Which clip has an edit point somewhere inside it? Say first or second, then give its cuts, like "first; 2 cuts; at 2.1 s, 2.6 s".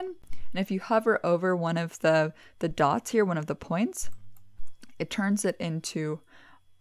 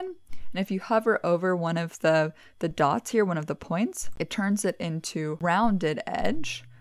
second; 2 cuts; at 4.0 s, 5.4 s